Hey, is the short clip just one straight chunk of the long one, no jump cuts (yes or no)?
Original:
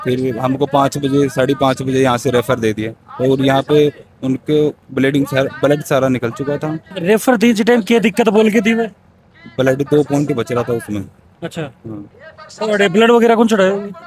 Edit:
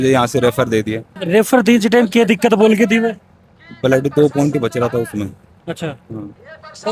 no